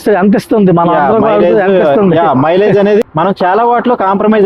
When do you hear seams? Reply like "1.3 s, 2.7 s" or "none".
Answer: 3.1 s